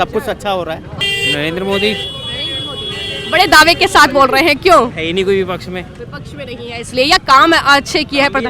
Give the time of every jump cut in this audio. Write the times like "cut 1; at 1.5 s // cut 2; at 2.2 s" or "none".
cut 1; at 1.1 s